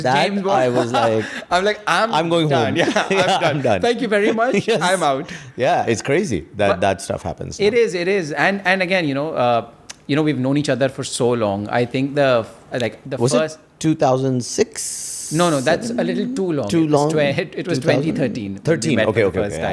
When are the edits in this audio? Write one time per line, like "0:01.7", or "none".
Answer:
none